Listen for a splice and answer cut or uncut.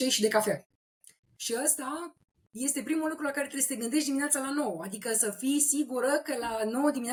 uncut